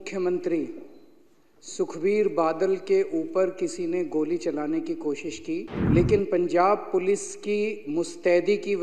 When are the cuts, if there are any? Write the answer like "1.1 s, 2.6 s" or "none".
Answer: 5.7 s